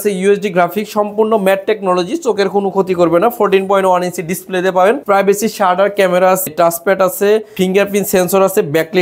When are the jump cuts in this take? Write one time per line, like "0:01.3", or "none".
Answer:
0:05.0
0:06.5
0:07.5

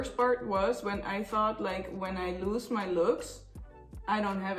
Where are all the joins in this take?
none

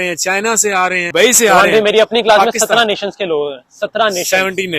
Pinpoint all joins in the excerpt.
0:01.1

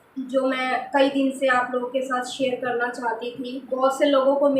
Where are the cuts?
0:03.6

